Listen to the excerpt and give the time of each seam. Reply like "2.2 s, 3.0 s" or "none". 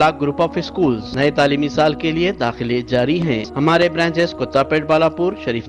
1.1 s, 3.5 s